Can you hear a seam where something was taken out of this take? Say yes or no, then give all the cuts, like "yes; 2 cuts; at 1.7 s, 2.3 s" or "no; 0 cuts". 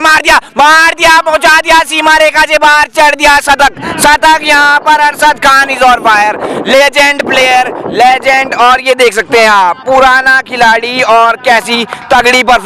no; 0 cuts